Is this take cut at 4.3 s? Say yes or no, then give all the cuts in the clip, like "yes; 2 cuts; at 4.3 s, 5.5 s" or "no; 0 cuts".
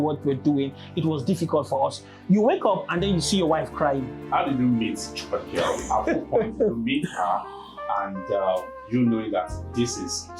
yes; 1 cut; at 4.3 s